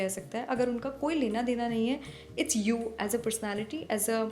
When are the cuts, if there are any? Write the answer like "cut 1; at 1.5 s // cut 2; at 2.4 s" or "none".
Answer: none